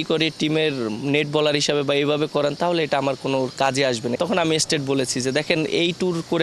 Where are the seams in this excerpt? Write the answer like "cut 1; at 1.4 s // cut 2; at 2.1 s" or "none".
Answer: cut 1; at 4.2 s